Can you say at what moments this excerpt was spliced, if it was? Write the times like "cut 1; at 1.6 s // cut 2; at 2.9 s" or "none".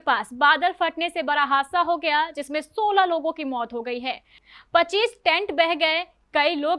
cut 1; at 4.3 s